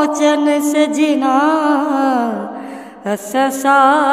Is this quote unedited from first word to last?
yes; 0 cuts

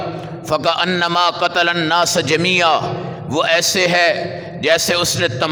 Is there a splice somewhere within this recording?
no; 0 cuts

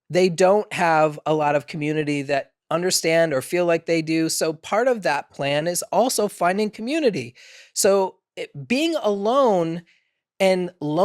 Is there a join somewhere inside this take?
no; 0 cuts

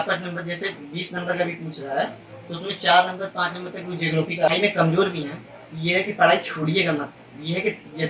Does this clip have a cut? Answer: yes; 1 cut; at 4.5 s

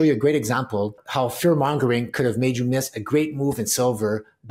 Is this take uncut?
no; 1 cut; at 1.0 s

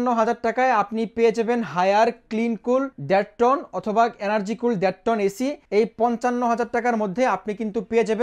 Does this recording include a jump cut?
yes; 2 cuts; at 3.0 s, 5.6 s

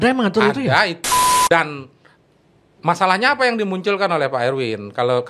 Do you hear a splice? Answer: yes; 1 cut; at 1.0 s

